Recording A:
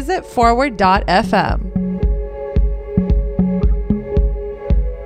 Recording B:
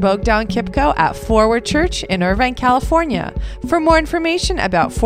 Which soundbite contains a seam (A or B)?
A